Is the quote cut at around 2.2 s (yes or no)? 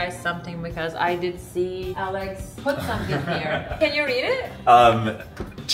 yes